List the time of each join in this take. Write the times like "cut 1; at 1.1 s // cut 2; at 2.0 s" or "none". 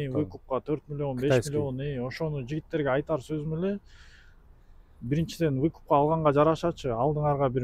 none